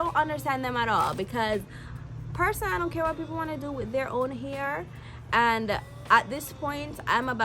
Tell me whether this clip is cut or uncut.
uncut